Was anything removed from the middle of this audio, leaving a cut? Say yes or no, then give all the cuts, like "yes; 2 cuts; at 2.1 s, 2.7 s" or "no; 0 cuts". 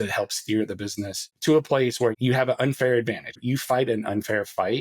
yes; 3 cuts; at 1.2 s, 2.2 s, 3.4 s